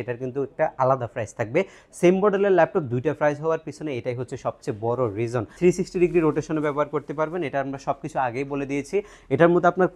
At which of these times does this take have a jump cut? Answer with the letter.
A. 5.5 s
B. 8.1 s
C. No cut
A